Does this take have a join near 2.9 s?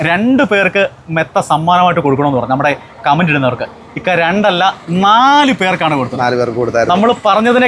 no; 0 cuts

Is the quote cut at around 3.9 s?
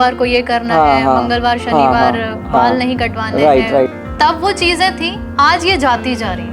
yes; 1 cut; at 3.9 s

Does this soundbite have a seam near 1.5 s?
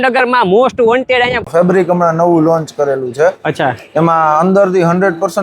yes; 1 cut; at 1.5 s

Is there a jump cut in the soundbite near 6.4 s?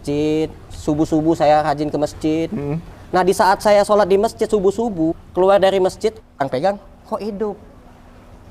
yes; 2 cuts; at 5.2 s, 6.4 s

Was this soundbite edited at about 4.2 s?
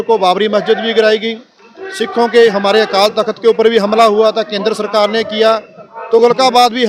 no; 0 cuts

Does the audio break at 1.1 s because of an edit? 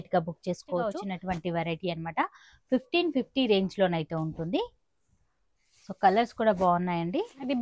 yes; 1 cut; at 1.1 s

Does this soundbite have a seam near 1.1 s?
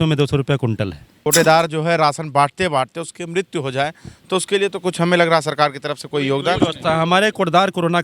yes; 1 cut; at 1.1 s

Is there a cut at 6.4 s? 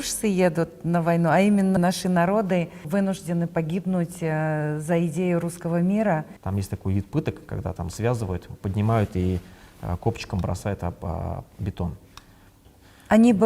yes; 4 cuts; at 1.8 s, 2.9 s, 6.4 s, 12.6 s

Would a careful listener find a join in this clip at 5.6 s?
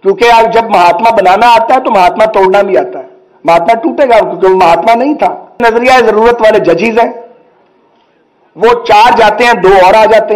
yes; 1 cut; at 5.6 s

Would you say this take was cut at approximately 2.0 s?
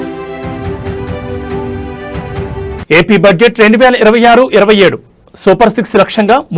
yes; 1 cut; at 2.0 s

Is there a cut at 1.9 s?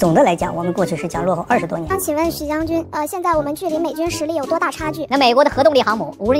yes; 2 cuts; at 1.9 s, 5.0 s

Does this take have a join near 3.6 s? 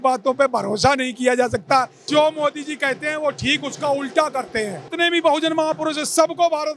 no; 2 cuts; at 2.0 s, 4.8 s

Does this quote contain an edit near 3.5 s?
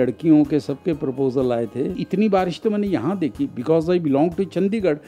no; 1 cut; at 2.0 s

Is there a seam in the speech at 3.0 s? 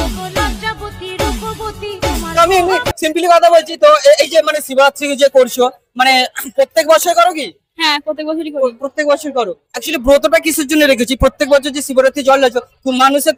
no; 0 cuts

